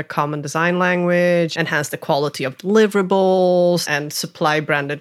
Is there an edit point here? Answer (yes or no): yes